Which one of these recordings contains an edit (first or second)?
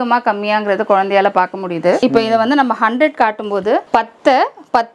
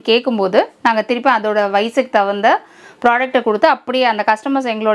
first